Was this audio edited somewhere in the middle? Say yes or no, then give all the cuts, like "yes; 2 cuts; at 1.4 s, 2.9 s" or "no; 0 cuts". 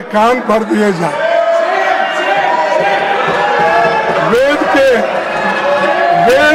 no; 0 cuts